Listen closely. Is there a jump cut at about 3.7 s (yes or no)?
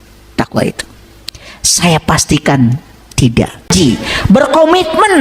yes